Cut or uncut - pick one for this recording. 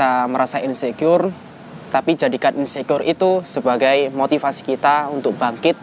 uncut